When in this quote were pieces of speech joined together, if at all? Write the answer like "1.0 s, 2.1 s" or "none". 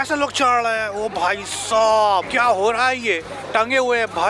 2.3 s, 3.3 s

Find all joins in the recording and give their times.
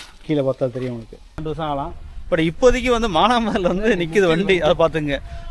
1.4 s

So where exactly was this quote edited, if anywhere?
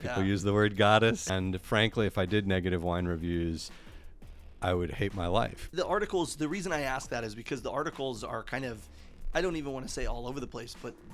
1.3 s, 5.7 s

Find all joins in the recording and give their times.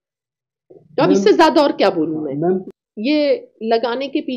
2.6 s

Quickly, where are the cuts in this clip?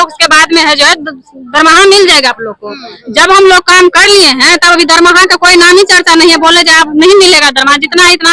none

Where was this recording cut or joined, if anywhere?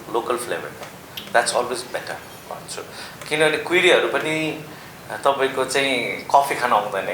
none

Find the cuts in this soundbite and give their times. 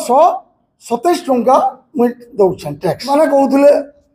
3.0 s

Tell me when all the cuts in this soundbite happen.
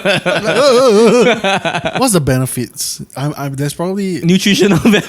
2.0 s

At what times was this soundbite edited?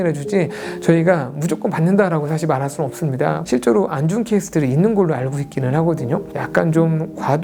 3.4 s, 6.3 s

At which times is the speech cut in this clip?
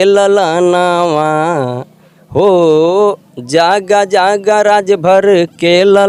none

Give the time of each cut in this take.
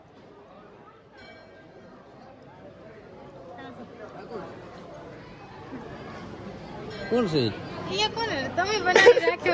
none

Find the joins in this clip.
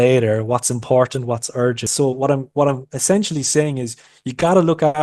1.9 s

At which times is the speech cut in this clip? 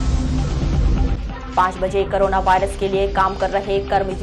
none

